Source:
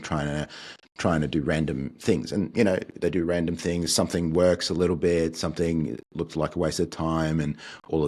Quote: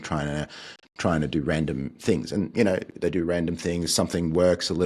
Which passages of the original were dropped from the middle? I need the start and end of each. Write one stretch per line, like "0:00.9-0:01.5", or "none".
none